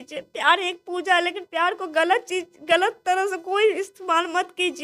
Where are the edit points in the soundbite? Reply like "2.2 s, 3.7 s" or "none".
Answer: none